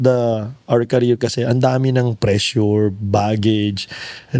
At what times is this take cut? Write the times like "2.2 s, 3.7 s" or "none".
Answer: none